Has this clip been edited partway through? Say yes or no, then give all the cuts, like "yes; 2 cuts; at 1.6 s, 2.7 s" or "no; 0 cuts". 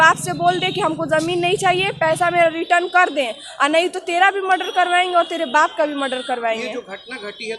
no; 0 cuts